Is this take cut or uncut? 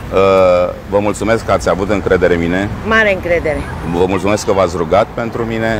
uncut